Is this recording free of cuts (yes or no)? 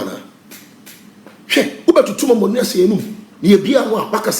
yes